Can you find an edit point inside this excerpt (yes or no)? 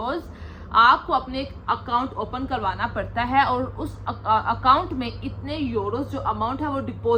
no